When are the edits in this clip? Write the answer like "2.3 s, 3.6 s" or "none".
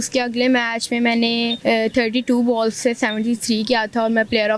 1.5 s